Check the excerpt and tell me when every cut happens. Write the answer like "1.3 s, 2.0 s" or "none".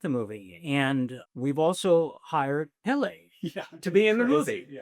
1.2 s